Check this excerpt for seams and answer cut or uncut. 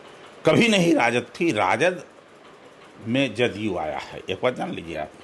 uncut